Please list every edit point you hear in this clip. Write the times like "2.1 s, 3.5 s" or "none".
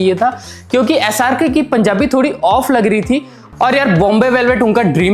3.4 s